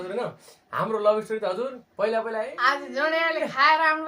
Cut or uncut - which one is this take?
cut